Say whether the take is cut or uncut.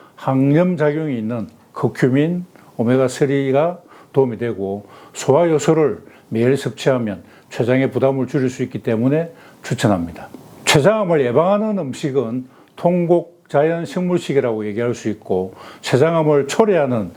uncut